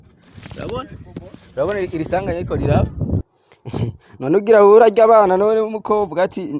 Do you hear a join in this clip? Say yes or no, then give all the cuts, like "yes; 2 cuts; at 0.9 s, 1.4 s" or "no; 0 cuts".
yes; 1 cut; at 3.3 s